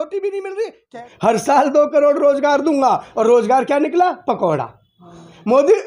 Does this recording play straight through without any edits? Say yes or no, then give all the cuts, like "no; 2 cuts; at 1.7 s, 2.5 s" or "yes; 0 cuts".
no; 1 cut; at 1.1 s